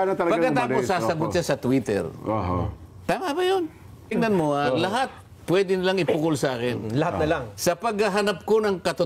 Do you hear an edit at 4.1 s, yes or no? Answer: yes